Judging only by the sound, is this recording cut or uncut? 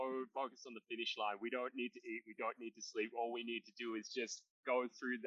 uncut